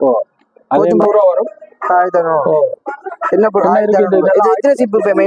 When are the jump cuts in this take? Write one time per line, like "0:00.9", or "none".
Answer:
0:01.0